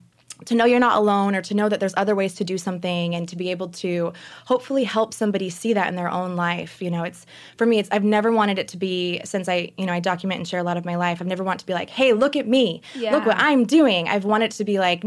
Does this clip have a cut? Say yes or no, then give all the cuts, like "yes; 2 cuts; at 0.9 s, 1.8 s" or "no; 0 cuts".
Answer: no; 0 cuts